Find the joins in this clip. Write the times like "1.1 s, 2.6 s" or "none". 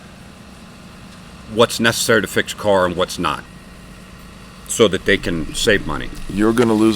3.4 s